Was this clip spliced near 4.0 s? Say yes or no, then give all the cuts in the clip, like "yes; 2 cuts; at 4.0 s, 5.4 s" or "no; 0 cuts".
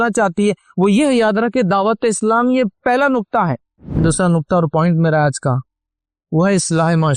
yes; 1 cut; at 4.0 s